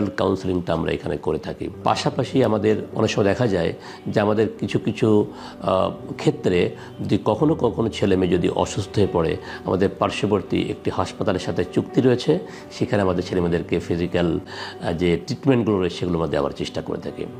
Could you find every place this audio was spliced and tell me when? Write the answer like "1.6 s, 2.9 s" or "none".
none